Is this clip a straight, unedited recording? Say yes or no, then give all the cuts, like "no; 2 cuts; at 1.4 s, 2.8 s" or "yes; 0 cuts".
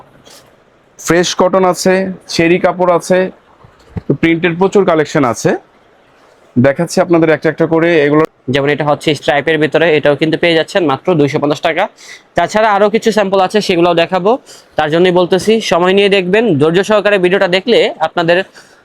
no; 1 cut; at 8.3 s